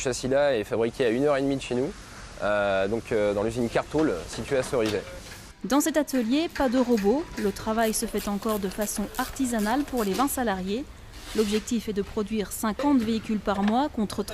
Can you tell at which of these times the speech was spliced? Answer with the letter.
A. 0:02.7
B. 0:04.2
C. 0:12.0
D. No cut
B